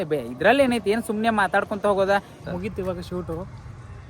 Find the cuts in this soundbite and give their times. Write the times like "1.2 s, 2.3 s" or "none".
2.4 s